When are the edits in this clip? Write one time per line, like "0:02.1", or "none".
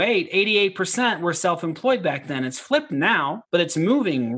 0:03.4